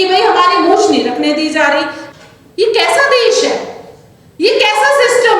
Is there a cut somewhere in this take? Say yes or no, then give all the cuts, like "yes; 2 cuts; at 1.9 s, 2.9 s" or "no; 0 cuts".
yes; 1 cut; at 2.0 s